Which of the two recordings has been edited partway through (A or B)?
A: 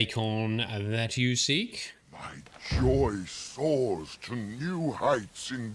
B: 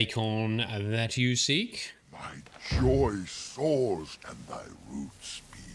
B